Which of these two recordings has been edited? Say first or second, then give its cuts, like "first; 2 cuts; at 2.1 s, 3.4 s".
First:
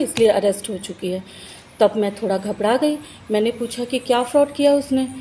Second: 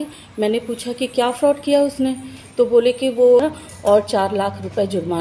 second; 1 cut; at 3.4 s